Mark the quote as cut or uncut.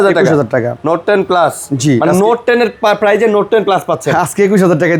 uncut